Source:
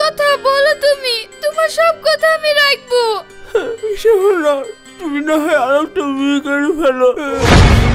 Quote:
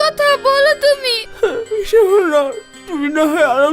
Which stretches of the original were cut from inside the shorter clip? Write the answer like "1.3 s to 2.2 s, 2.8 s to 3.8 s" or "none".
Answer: 1.2 s to 3.3 s